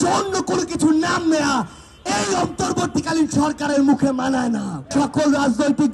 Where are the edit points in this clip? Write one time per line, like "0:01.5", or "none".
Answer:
0:04.8